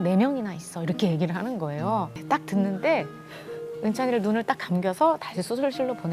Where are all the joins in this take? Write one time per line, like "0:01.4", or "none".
0:02.2